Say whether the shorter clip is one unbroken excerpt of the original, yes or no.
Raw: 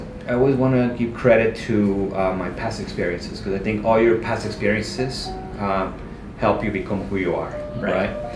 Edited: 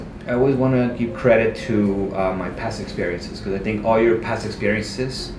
yes